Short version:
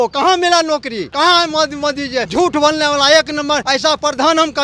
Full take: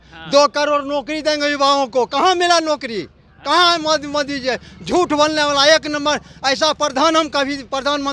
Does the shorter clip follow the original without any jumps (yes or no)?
no